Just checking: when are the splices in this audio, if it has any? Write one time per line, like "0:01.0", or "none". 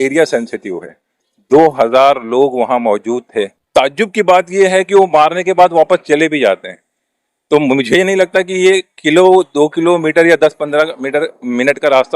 0:03.6